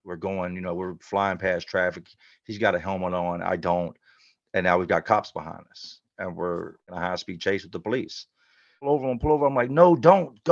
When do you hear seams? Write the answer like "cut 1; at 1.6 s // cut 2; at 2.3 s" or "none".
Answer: cut 1; at 6.9 s // cut 2; at 8.9 s